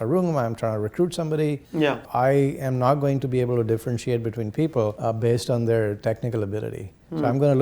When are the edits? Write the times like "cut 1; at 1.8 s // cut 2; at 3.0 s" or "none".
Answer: cut 1; at 2.1 s // cut 2; at 5.0 s